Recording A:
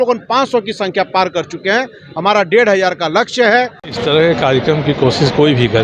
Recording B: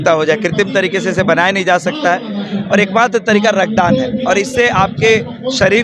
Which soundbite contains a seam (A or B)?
A